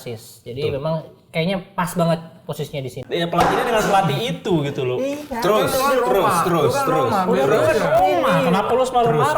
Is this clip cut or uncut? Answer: cut